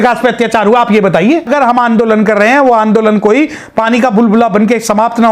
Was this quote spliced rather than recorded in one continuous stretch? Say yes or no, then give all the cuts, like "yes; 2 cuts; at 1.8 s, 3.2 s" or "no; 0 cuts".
yes; 1 cut; at 1.5 s